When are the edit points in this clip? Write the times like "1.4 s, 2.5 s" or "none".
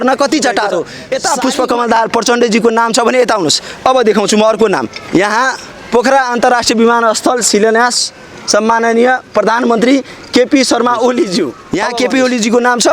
1.0 s, 11.7 s